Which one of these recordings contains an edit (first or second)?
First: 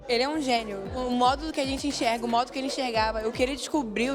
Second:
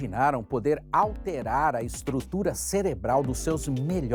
first